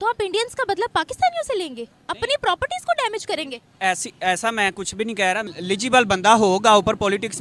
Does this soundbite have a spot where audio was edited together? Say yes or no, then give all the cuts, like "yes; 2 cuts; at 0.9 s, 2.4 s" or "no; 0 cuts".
yes; 1 cut; at 5.4 s